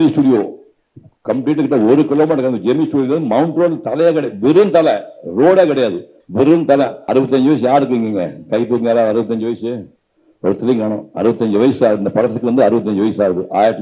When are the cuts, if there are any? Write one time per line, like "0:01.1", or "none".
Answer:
0:07.0